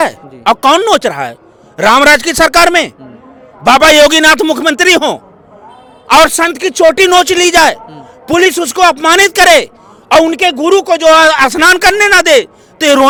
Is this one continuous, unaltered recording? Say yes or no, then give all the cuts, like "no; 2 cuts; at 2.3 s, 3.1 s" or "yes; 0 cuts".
yes; 0 cuts